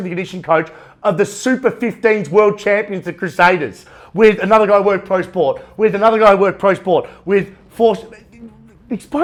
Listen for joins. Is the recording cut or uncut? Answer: uncut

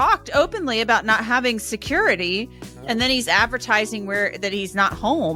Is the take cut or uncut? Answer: uncut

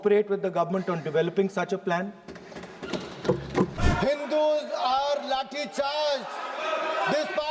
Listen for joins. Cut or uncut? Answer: cut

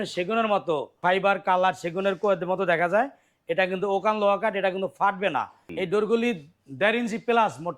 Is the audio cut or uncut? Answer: cut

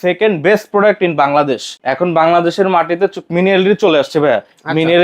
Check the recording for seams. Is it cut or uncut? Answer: cut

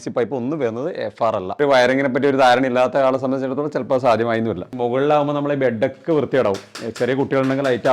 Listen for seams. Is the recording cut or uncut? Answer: cut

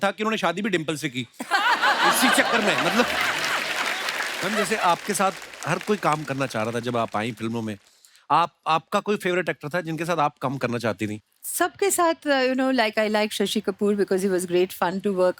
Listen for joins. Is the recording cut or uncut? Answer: cut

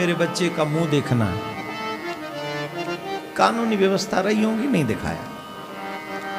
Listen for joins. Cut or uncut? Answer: uncut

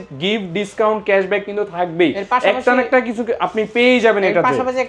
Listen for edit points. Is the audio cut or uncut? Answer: uncut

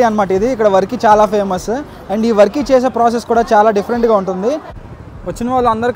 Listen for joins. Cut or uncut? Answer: uncut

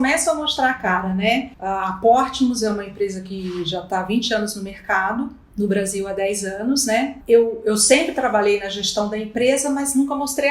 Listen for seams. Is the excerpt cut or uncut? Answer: cut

